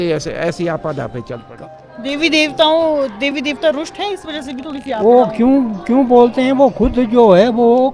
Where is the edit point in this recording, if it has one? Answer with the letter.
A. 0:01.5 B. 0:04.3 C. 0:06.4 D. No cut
A